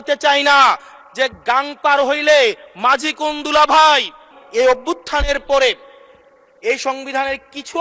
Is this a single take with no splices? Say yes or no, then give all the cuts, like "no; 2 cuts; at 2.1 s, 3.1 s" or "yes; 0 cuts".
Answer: no; 1 cut; at 4.3 s